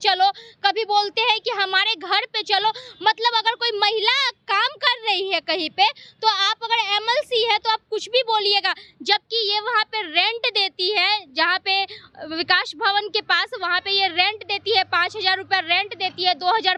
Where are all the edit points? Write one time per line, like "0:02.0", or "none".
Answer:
none